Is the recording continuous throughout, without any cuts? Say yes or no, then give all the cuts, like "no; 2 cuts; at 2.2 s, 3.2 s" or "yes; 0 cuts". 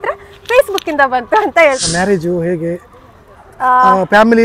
no; 1 cut; at 1.8 s